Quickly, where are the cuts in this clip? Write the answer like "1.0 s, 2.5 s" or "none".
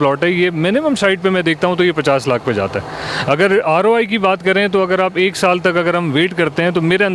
none